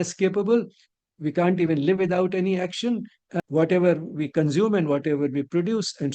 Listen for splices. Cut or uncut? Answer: cut